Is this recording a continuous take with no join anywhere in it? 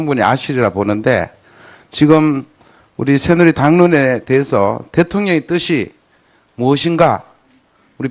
no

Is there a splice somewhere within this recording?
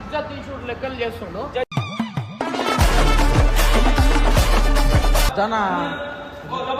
yes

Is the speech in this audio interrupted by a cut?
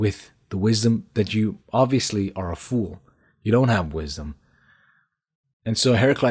no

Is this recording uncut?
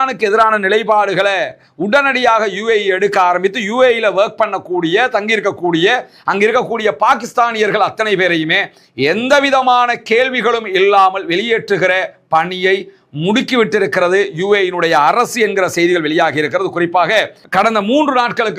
no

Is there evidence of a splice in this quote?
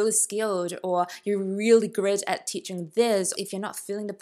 yes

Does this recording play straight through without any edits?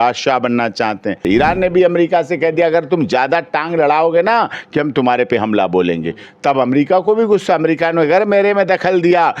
no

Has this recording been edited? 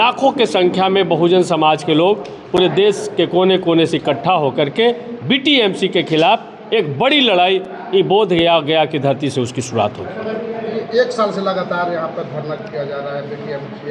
no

